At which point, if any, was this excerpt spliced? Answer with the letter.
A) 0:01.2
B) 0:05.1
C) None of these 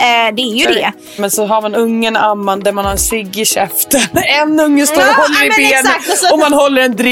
A